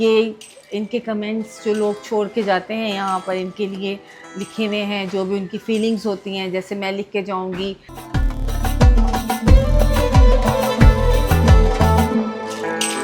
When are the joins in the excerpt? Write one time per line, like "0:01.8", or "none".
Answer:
none